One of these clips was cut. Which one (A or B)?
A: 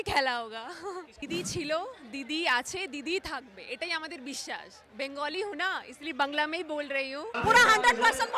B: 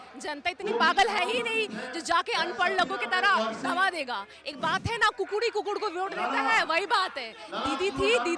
A